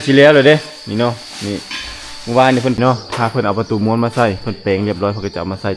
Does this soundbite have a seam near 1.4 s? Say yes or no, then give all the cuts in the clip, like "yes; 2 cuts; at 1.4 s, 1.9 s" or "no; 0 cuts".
no; 1 cut; at 2.8 s